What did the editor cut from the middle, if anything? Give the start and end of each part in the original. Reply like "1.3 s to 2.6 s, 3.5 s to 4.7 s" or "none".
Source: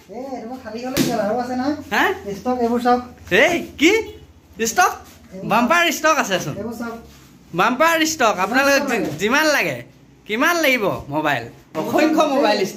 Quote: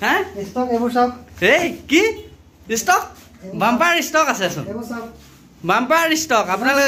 none

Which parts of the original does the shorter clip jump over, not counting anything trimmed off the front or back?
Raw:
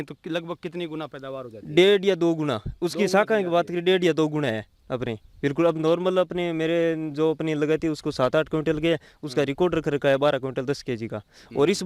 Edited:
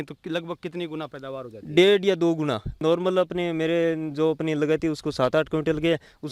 2.8 s to 5.8 s

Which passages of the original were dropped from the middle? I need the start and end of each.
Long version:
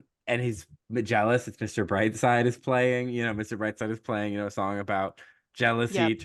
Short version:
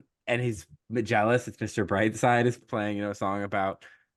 2.6 s to 4.0 s

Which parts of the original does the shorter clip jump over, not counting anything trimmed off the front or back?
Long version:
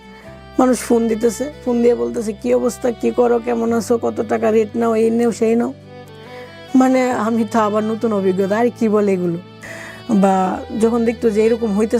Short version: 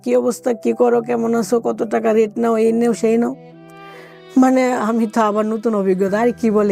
none

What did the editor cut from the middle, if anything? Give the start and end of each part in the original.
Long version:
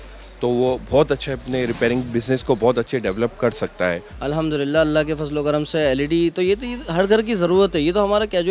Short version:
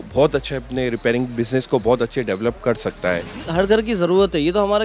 4.1 s to 6.7 s

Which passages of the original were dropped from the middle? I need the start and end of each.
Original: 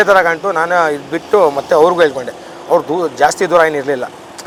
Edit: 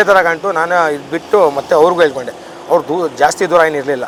none

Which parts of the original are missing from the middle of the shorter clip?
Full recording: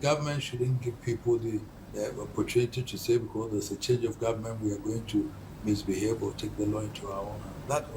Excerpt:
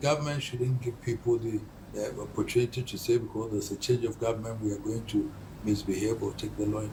none

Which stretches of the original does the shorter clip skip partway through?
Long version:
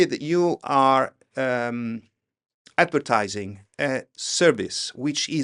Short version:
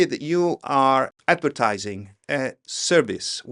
1.2 s to 2.7 s

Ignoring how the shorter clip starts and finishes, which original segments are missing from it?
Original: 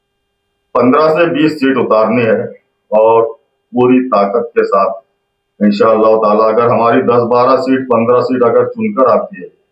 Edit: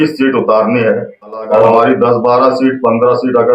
3.2 s to 6.8 s

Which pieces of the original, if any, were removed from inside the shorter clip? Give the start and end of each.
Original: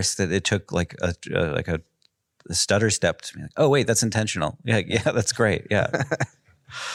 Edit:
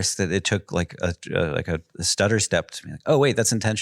2.0 s to 2.5 s

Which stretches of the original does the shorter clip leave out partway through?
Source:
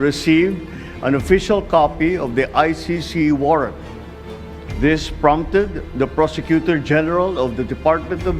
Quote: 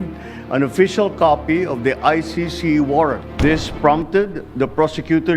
3.8 s to 4.7 s

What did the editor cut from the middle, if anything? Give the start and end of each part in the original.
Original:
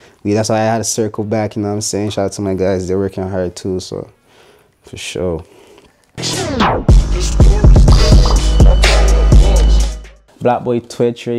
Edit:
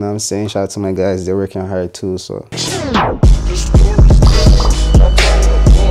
4.1 s to 6.2 s

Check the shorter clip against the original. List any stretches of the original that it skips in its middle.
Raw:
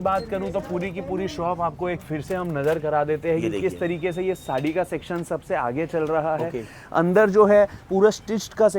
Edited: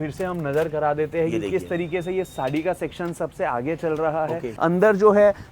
6.6 s to 6.8 s

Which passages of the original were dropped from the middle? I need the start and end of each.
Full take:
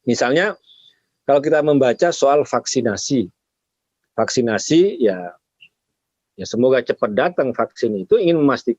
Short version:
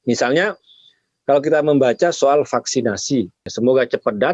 3.4 s to 6.4 s

